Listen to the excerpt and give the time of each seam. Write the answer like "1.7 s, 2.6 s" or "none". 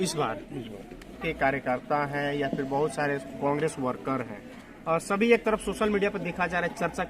1.2 s